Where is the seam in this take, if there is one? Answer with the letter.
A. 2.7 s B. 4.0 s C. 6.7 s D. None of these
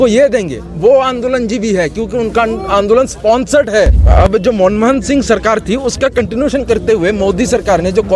B